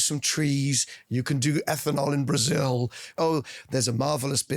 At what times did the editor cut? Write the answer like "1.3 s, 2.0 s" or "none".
3.1 s